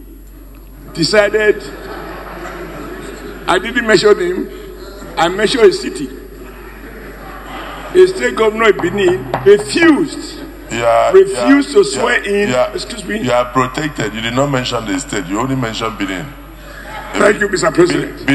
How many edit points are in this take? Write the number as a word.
zero